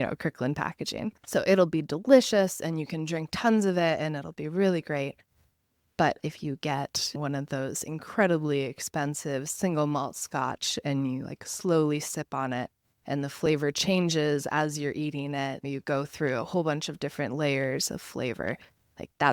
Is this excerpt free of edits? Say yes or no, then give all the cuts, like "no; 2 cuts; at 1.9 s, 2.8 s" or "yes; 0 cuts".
yes; 0 cuts